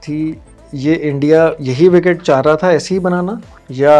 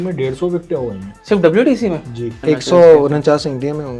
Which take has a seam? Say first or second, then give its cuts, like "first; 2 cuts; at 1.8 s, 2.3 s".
second; 2 cuts; at 1.1 s, 2.3 s